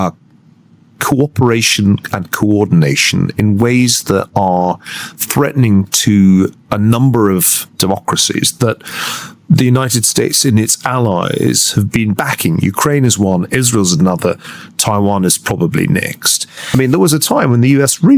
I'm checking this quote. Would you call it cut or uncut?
cut